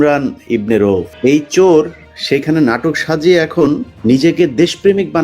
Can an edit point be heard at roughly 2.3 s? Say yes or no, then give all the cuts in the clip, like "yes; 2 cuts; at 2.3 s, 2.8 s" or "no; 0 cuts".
no; 2 cuts; at 1.1 s, 3.9 s